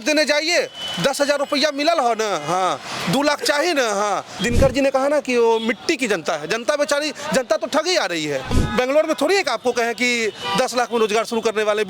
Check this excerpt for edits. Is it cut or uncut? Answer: cut